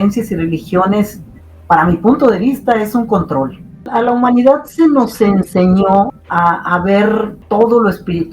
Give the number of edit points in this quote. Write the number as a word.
three